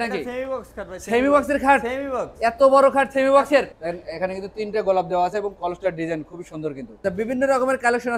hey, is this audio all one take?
no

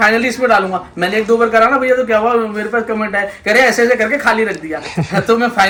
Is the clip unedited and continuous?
yes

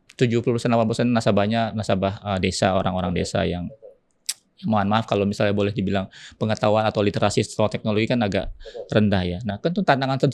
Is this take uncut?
yes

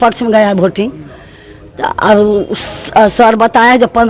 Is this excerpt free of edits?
yes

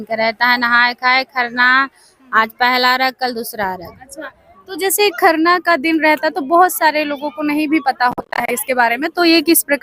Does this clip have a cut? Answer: no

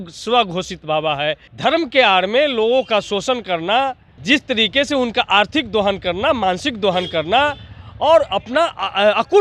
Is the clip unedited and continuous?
no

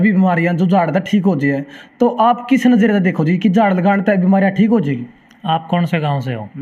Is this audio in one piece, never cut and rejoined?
yes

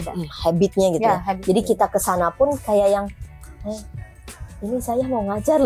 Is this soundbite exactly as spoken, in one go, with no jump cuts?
yes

